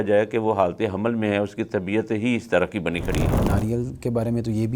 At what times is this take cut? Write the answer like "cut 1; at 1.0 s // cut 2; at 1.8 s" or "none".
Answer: cut 1; at 3.4 s